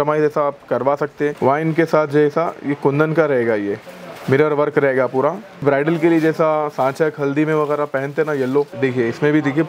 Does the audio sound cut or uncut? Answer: cut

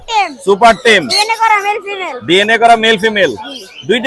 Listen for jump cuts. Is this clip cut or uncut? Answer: uncut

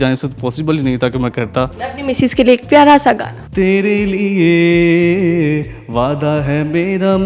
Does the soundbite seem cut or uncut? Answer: cut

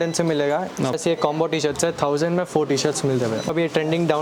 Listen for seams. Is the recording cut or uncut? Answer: cut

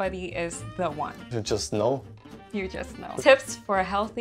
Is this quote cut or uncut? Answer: cut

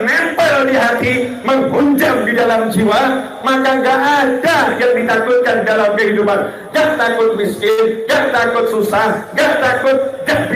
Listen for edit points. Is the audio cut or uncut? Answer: uncut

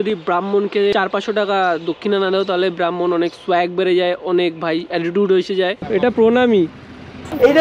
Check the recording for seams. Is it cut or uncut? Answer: cut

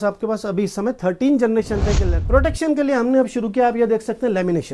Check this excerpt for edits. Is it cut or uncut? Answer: cut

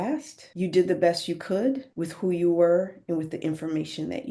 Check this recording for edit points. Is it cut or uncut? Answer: uncut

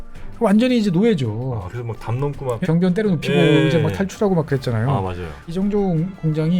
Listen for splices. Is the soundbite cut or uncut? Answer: cut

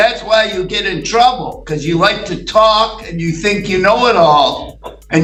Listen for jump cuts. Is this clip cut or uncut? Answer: uncut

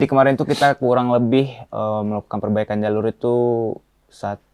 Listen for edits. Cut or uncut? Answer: uncut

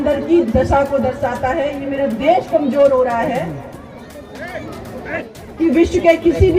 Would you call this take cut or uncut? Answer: cut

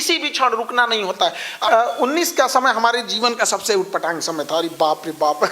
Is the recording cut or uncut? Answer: cut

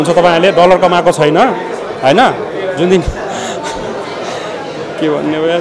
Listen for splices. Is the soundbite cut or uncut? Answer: uncut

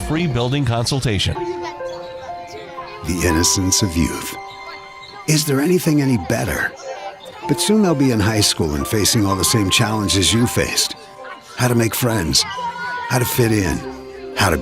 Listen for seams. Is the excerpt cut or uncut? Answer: cut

